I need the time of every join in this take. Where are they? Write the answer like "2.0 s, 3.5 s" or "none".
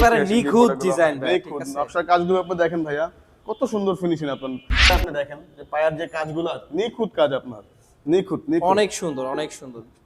4.9 s